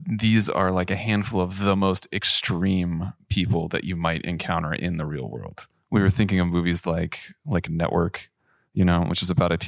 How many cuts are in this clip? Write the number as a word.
one